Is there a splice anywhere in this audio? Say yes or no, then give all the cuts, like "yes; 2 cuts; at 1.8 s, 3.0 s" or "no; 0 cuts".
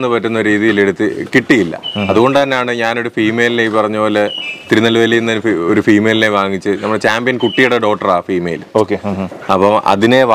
no; 0 cuts